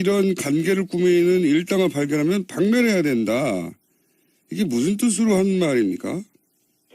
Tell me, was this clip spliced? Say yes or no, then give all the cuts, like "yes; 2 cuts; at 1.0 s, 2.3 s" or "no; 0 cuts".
yes; 1 cut; at 1.8 s